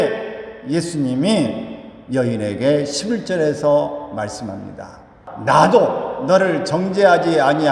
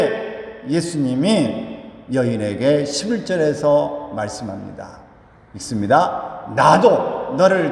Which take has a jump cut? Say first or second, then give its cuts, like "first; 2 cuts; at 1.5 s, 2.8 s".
first; 1 cut; at 5.3 s